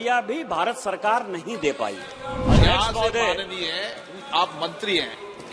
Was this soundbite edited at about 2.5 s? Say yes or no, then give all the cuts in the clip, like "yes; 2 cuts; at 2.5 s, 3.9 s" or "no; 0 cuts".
yes; 1 cut; at 2.5 s